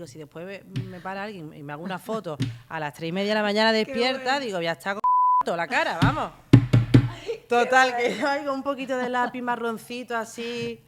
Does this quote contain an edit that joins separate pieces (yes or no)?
no